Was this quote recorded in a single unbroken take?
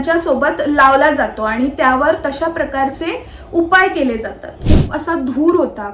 no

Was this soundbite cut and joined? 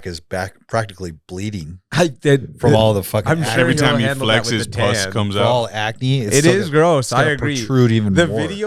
no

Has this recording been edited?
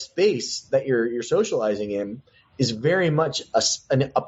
no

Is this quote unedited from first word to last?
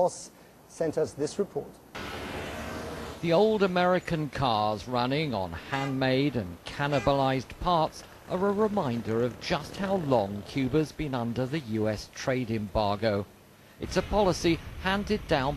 yes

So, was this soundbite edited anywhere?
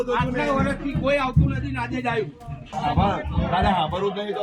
yes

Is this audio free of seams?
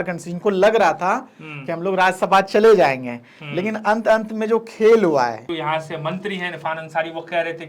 no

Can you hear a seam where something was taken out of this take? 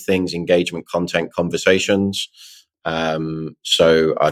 no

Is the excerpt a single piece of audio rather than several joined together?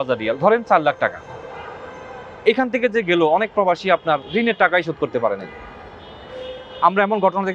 yes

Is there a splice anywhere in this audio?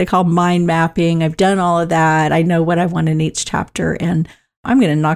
no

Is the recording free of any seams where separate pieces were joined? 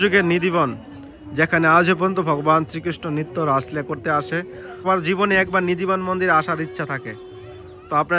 no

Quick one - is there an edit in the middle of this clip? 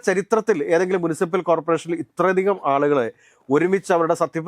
no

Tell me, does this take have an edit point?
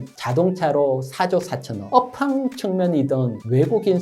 yes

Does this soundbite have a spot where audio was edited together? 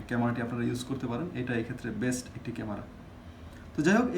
no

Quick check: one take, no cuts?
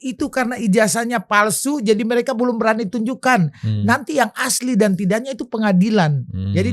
yes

